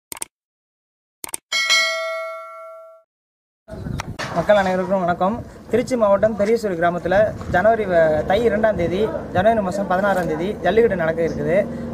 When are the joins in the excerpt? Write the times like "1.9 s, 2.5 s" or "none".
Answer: 3.7 s